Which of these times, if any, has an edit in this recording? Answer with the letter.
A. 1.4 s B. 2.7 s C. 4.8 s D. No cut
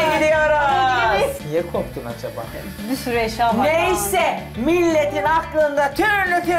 A